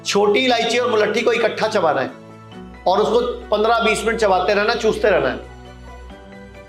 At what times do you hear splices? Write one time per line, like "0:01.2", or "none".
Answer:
none